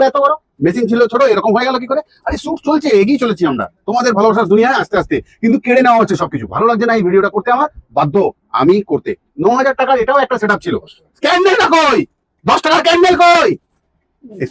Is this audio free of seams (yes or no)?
yes